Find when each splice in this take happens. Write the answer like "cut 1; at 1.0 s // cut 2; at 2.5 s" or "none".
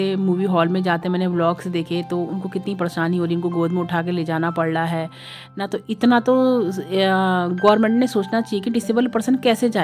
none